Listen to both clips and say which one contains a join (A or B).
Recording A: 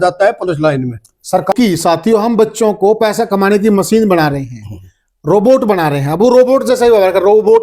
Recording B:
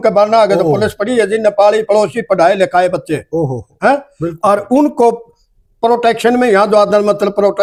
A